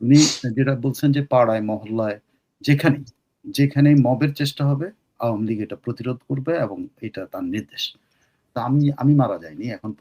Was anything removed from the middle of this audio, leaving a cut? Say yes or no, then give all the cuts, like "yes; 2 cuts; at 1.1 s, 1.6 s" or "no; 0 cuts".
yes; 1 cut; at 8.5 s